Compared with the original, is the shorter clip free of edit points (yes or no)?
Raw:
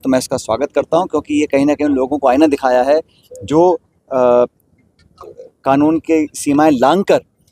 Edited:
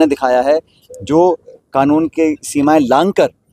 no